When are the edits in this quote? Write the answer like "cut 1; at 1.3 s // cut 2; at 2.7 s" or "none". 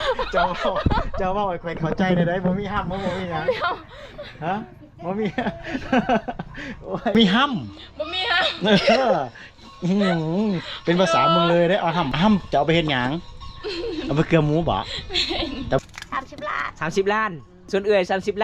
cut 1; at 7.1 s // cut 2; at 12.1 s // cut 3; at 15.8 s // cut 4; at 17.6 s

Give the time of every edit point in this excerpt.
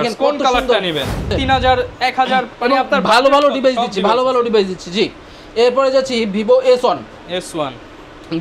cut 1; at 1.3 s

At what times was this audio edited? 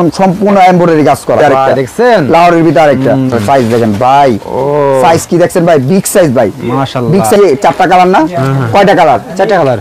cut 1; at 1.4 s // cut 2; at 3.3 s // cut 3; at 7.4 s

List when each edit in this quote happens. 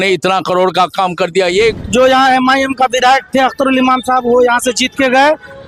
cut 1; at 1.8 s

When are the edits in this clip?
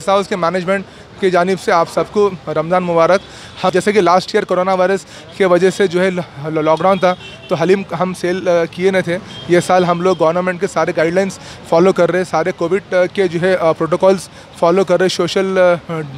cut 1; at 3.7 s

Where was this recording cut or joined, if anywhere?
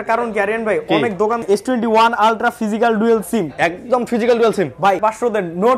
cut 1; at 1.4 s // cut 2; at 5.0 s

